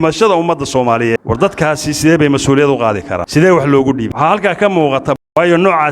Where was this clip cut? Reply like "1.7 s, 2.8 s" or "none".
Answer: 1.2 s, 3.2 s, 4.1 s, 5.2 s